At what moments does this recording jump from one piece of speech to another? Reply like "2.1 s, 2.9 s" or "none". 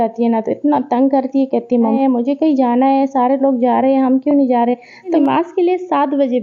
2.0 s, 5.2 s